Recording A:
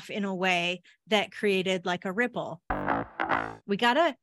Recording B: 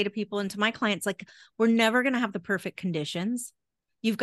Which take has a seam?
A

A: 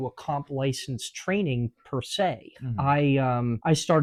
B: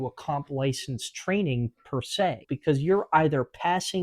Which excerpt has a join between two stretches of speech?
B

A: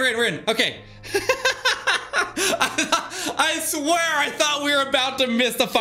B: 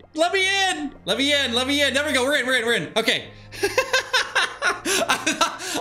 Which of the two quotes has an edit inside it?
B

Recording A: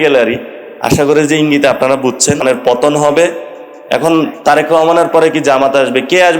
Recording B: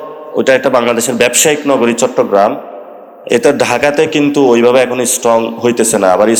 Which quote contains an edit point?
A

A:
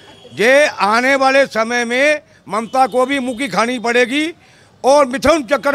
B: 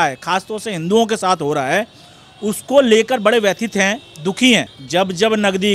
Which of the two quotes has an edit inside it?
B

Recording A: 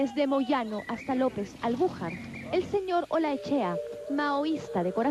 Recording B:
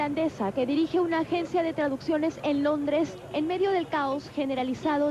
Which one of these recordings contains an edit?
A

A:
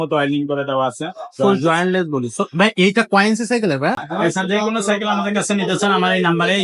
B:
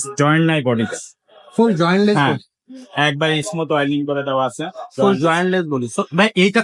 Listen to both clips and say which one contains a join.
A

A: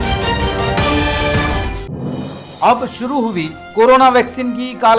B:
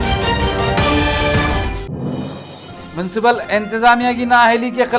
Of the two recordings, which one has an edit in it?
B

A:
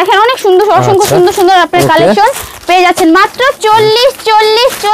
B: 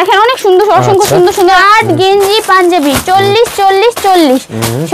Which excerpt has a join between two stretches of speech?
B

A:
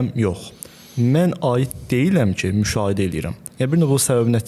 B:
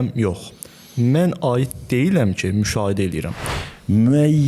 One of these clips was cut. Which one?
B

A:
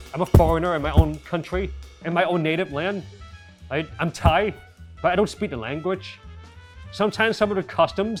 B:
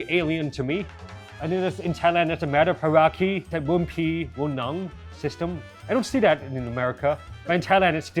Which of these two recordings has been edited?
B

